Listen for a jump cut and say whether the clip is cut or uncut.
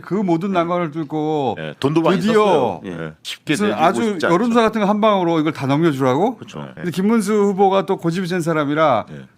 cut